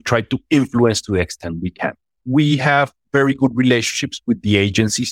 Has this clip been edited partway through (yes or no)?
yes